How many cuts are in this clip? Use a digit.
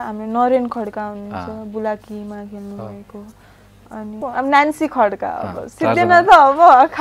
1